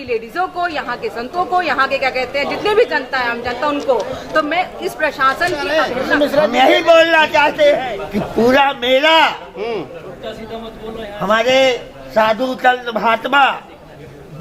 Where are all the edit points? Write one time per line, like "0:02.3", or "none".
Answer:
0:05.7
0:08.0